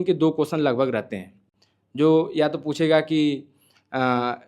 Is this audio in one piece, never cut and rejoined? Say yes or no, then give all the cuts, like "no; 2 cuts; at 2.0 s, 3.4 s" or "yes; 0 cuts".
yes; 0 cuts